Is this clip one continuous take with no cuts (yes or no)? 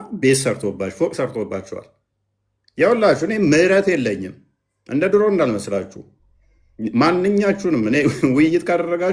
yes